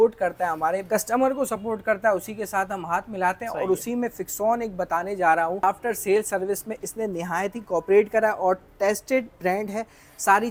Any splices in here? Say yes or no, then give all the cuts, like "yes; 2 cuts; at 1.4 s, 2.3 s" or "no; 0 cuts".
no; 0 cuts